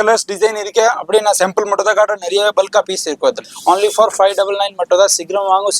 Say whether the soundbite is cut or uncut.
cut